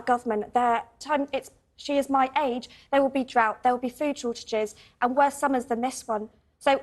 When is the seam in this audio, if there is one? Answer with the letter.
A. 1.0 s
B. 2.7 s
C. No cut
A